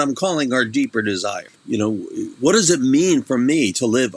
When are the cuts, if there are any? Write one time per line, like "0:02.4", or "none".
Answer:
0:01.5
0:02.3